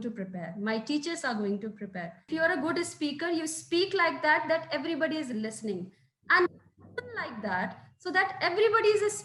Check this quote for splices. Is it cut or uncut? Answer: cut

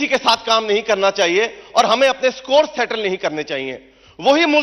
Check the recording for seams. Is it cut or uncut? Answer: uncut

